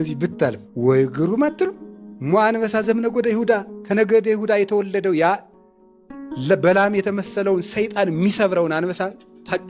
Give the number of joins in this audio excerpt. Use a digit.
0